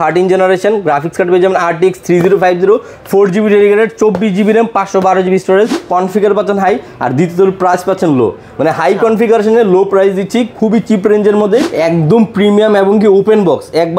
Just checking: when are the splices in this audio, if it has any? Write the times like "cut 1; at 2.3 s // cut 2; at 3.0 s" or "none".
cut 1; at 5.8 s // cut 2; at 11.7 s